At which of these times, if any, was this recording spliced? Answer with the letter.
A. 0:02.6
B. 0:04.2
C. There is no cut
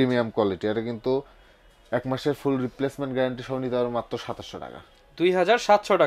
C